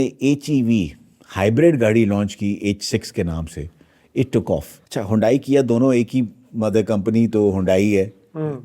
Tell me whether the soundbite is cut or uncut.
cut